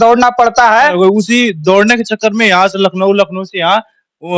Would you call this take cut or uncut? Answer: cut